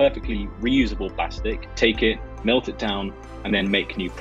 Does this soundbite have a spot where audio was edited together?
yes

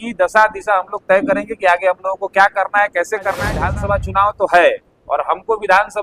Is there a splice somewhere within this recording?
yes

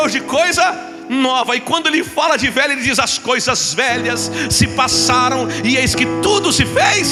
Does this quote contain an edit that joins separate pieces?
no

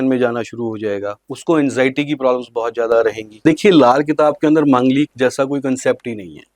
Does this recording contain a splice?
yes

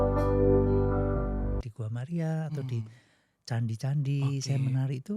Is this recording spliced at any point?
yes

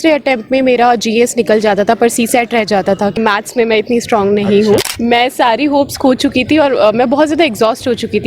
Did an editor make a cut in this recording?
yes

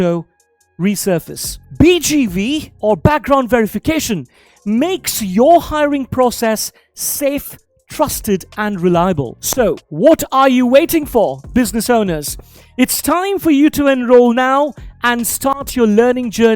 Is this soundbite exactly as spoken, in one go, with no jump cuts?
no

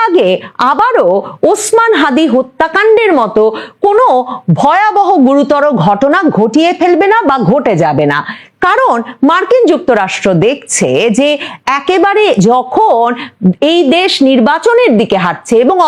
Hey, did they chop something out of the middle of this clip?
no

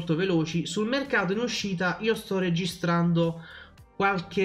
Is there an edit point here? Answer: no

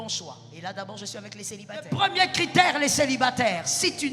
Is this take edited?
yes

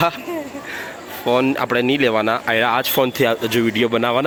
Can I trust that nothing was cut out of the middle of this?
yes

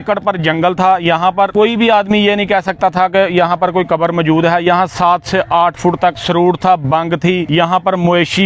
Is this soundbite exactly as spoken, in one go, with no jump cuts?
no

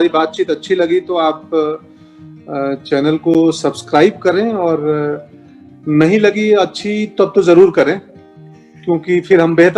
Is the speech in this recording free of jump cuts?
yes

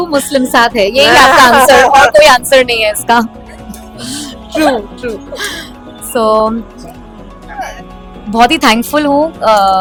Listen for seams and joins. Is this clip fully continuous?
yes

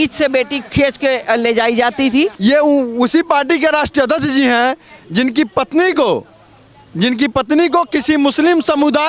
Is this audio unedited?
no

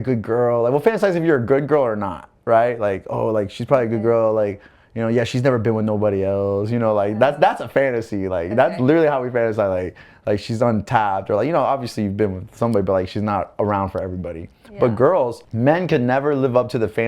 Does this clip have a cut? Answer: yes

